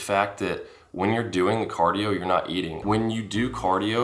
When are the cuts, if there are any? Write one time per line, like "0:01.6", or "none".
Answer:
0:02.8